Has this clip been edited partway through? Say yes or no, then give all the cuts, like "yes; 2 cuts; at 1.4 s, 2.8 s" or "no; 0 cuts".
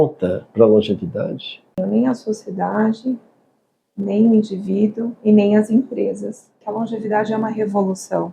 yes; 2 cuts; at 1.8 s, 6.6 s